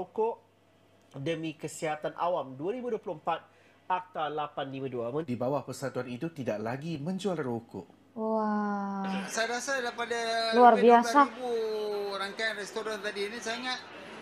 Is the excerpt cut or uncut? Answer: cut